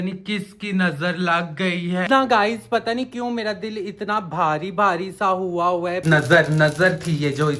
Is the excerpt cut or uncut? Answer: cut